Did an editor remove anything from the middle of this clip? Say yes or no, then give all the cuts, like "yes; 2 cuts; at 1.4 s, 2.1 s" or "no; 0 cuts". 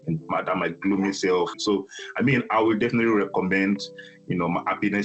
yes; 1 cut; at 1.5 s